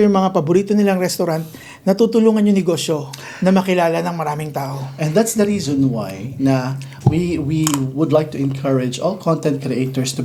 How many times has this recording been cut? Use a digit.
0